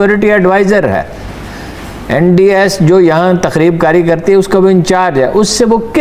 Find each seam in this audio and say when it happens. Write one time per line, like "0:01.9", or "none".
none